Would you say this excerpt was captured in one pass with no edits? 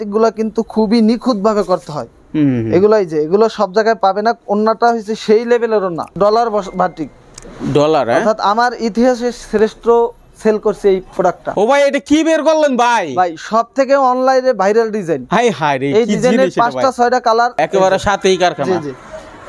no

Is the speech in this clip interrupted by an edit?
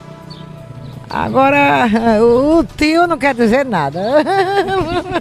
no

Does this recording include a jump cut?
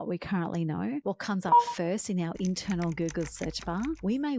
no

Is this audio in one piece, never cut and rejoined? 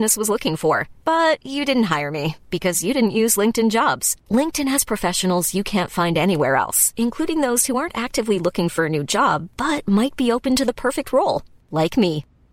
yes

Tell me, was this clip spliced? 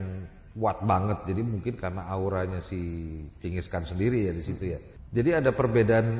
yes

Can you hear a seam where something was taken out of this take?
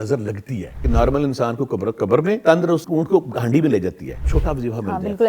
yes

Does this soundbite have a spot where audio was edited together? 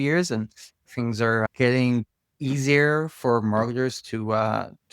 yes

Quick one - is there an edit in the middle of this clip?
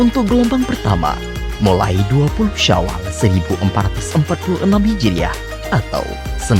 no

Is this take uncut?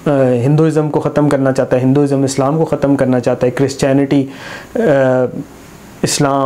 yes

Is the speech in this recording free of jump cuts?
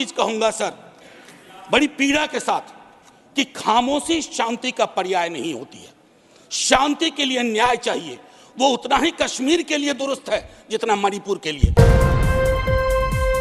no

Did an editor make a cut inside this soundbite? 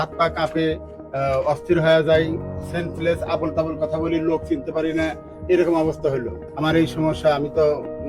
yes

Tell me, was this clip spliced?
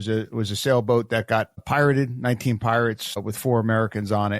yes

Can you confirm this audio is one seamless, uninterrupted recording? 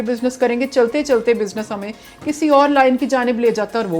yes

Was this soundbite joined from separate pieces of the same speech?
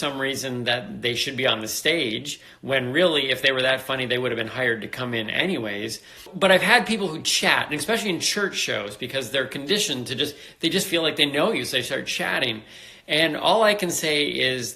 yes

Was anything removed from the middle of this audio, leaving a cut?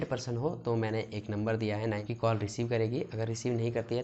yes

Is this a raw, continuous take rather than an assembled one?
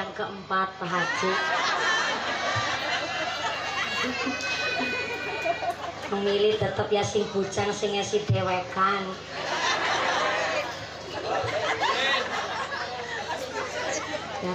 yes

